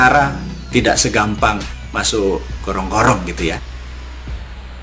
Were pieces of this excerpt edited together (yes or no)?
yes